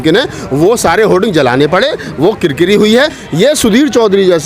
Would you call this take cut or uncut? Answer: cut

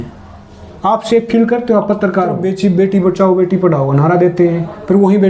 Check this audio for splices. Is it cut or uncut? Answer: cut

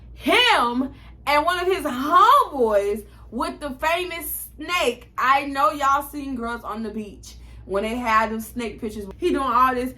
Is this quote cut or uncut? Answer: cut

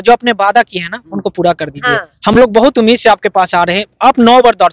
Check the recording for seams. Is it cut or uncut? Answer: uncut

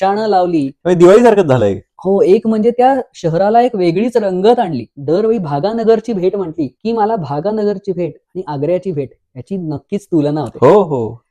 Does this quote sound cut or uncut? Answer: cut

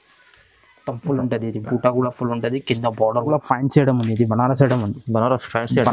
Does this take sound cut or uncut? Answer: cut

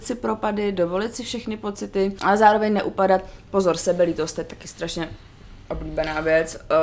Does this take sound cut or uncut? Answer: cut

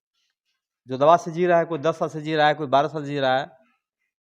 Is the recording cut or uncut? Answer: uncut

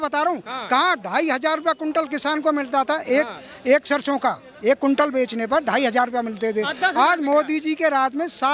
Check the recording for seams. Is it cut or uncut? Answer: uncut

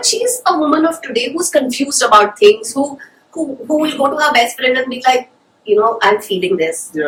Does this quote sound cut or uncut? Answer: uncut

